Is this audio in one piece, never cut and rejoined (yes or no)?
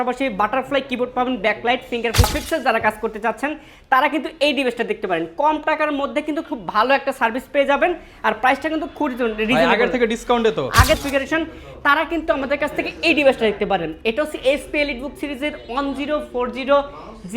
no